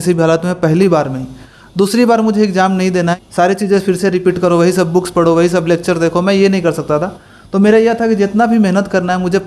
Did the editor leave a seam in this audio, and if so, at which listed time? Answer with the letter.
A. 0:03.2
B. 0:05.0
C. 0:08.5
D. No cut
A